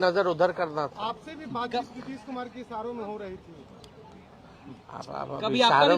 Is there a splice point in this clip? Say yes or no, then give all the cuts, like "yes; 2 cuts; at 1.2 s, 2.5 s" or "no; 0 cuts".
no; 0 cuts